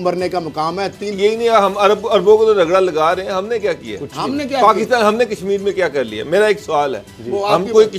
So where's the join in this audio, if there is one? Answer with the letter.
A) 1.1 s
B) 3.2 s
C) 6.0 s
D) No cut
A